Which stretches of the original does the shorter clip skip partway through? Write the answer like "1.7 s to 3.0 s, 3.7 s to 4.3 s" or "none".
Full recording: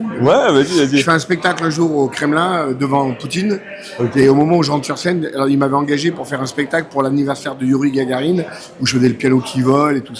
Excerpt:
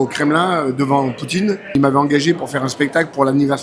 3.8 s to 5.5 s